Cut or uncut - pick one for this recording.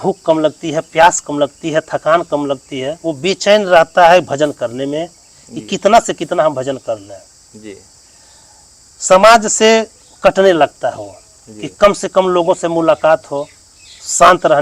uncut